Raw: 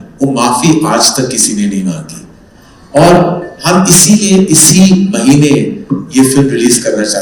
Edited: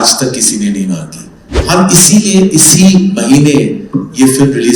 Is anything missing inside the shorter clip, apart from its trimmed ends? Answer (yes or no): yes